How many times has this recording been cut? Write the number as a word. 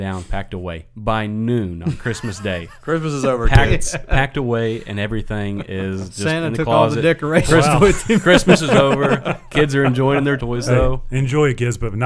one